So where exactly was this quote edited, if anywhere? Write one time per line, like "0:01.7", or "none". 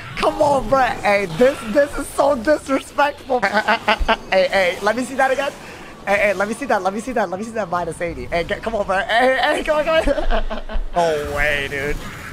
0:03.4
0:11.0